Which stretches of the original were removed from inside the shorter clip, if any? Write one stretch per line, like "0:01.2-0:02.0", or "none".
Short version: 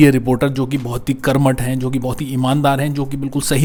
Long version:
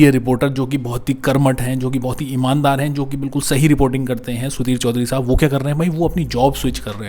none

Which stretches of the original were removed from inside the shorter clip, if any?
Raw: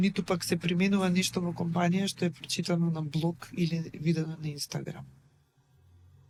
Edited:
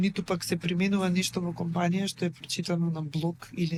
none

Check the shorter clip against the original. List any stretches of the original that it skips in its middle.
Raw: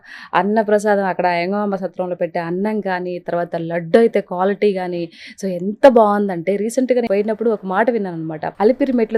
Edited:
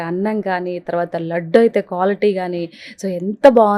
none

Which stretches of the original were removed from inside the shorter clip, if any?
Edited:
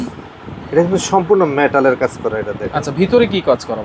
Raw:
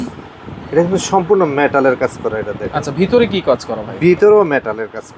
none

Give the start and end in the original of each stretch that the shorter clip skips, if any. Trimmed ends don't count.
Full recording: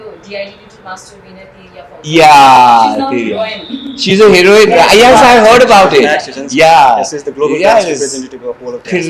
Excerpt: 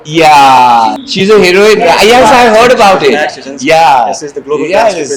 0:03.0-0:03.9

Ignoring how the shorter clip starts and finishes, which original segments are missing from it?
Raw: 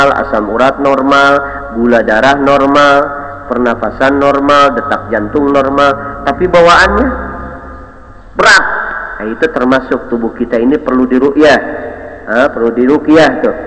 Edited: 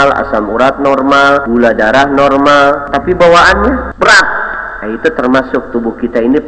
0:01.4-0:01.7
0:03.2-0:06.2
0:07.2-0:08.3

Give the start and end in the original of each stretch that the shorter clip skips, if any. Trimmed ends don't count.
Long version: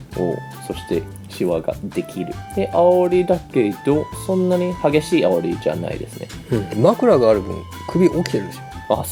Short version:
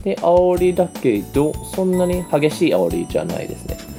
none

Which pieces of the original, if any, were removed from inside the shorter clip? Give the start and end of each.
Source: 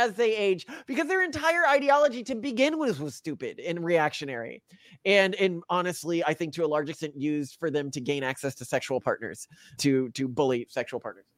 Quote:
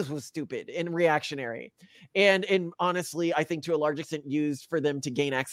none

